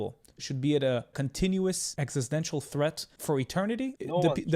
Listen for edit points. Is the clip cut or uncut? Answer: cut